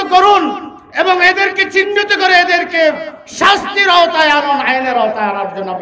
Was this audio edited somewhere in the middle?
no; 0 cuts

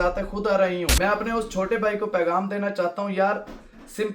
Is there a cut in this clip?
yes; 1 cut; at 0.9 s

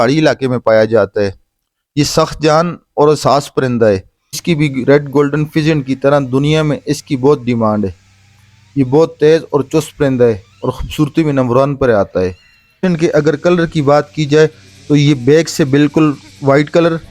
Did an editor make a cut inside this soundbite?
yes; 2 cuts; at 4.4 s, 12.8 s

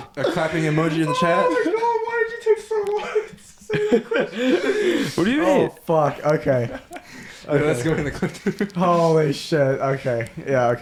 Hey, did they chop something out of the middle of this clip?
no; 0 cuts

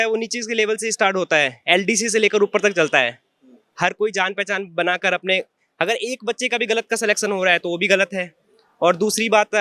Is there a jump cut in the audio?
no; 0 cuts

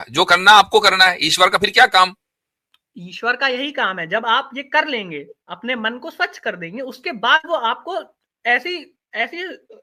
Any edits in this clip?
no; 0 cuts

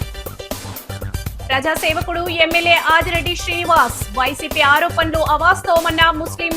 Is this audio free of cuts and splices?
no; 1 cut; at 1.5 s

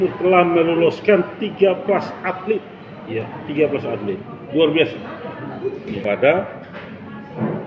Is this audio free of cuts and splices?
no; 1 cut; at 6.0 s

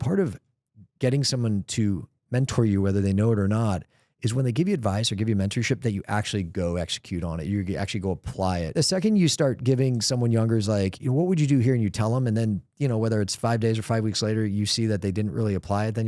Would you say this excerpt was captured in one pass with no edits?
no; 1 cut; at 8.7 s

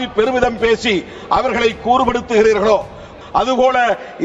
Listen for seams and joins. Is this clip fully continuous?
no; 1 cut; at 3.1 s

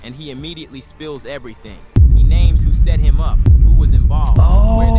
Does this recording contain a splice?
no; 0 cuts

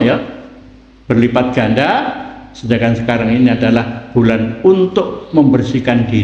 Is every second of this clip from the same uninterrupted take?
yes; 0 cuts

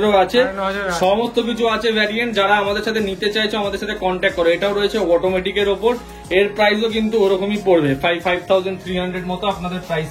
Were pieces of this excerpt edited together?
no; 0 cuts

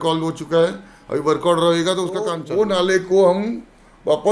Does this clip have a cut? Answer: yes; 1 cut; at 2.4 s

